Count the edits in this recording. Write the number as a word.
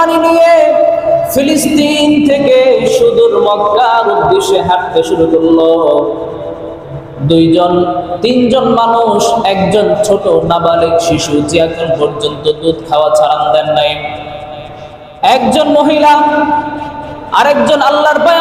zero